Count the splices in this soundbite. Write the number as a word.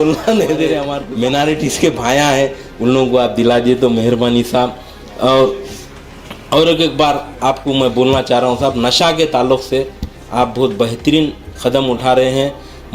one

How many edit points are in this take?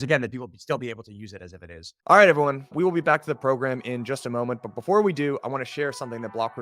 one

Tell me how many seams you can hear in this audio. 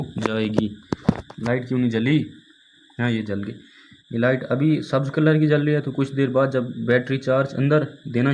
zero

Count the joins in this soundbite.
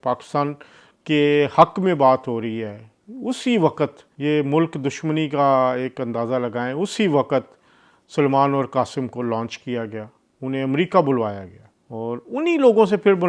zero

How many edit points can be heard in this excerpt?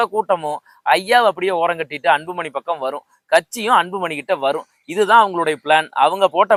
zero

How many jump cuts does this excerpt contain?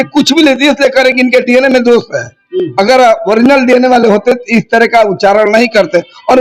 zero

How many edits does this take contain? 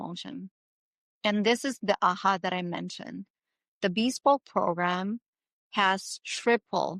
zero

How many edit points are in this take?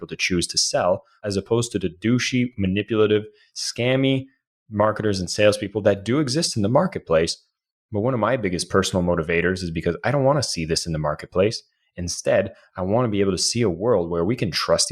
one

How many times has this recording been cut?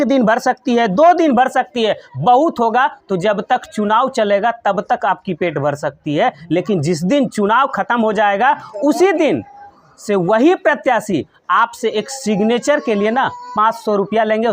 zero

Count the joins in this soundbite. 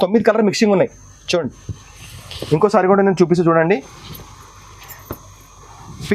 zero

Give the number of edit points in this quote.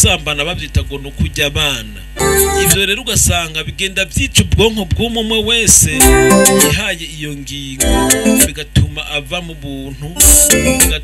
one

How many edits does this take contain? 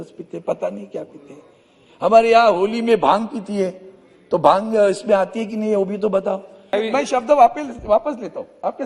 one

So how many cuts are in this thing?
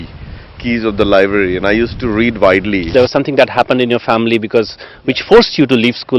one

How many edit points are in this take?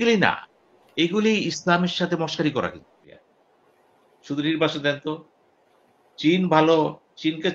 one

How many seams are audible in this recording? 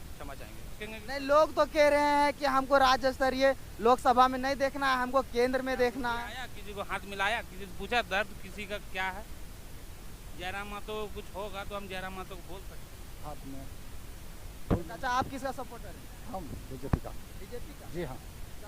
two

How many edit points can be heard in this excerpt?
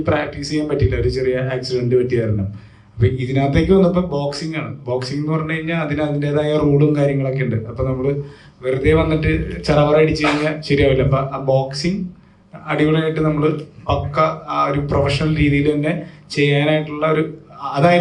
zero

